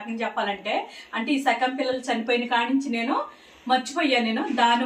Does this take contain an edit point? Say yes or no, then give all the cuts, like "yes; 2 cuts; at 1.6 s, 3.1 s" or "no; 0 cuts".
no; 0 cuts